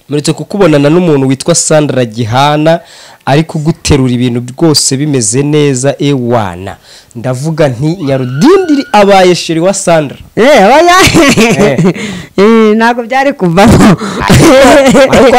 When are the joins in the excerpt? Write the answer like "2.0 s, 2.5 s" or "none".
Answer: none

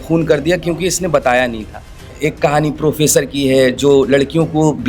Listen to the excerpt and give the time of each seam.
2.1 s

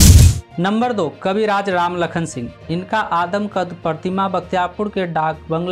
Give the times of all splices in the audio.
2.5 s

